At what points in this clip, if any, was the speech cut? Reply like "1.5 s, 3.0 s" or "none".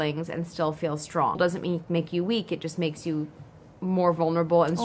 1.4 s